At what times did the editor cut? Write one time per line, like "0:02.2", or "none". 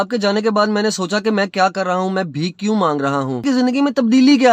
0:03.4